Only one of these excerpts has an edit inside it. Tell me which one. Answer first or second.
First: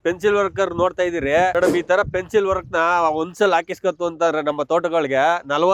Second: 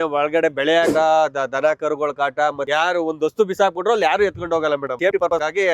second